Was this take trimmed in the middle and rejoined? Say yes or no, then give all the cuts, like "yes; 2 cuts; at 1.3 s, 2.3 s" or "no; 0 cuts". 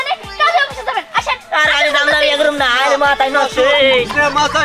no; 0 cuts